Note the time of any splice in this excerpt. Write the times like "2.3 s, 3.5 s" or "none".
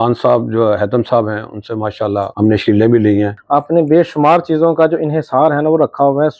2.3 s, 3.4 s